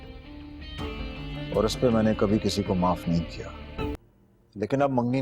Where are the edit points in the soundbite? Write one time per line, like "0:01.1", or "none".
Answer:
0:04.0